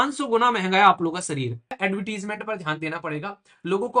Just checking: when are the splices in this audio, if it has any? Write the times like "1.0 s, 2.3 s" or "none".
1.8 s